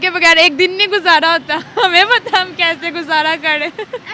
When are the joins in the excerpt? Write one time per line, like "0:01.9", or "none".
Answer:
none

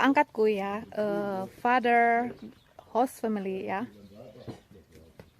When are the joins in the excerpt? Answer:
none

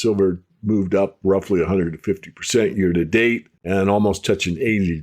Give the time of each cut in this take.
0:03.5

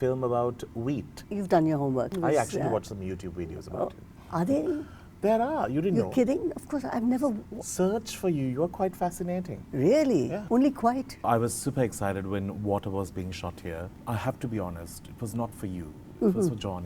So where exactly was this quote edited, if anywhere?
0:01.2
0:02.1
0:10.4
0:11.2
0:13.9

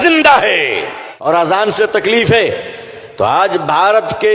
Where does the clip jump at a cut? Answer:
0:01.3

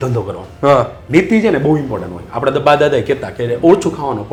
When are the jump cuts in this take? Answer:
none

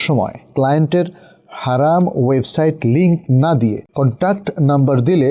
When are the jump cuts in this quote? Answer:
0:03.8

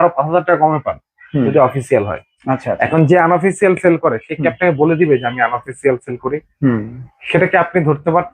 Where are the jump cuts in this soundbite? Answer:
none

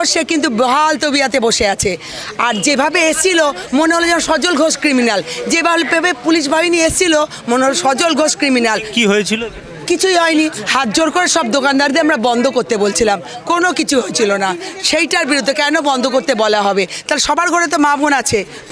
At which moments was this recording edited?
none

